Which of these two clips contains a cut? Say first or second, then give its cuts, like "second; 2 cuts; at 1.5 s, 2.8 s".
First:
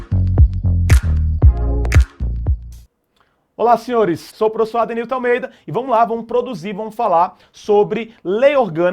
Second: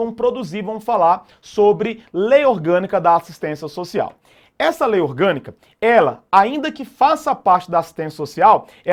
first; 1 cut; at 4.3 s